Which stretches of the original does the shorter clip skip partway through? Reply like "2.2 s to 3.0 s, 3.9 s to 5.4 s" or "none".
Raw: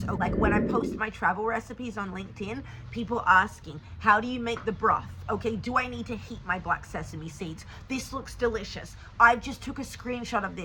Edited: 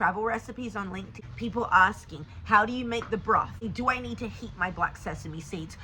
2.4 s to 2.7 s, 5.2 s to 5.5 s